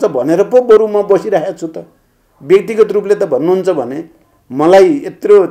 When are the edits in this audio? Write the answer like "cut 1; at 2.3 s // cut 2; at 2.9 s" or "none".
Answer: none